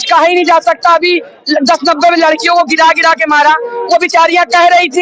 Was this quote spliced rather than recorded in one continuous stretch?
no; 0 cuts

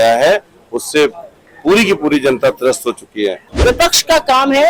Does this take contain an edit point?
yes; 1 cut; at 3.5 s

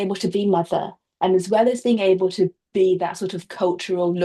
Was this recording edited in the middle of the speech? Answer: no; 0 cuts

